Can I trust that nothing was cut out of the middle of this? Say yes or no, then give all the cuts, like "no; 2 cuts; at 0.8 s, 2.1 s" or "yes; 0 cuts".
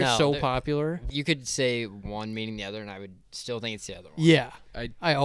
no; 1 cut; at 1.0 s